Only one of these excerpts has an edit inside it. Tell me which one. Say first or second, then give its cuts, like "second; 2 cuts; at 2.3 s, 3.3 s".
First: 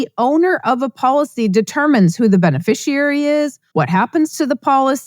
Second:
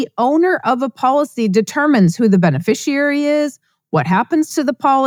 first; 1 cut; at 3.6 s